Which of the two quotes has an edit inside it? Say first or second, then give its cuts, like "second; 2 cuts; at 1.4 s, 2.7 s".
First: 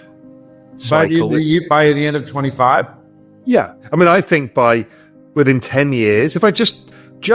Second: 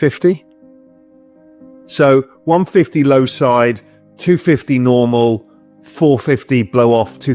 first; 1 cut; at 3.8 s